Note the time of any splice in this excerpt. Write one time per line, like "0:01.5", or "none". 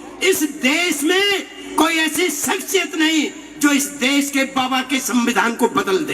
0:01.6